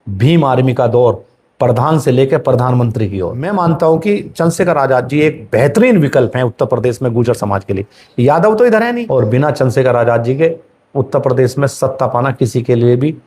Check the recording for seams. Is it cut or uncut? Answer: cut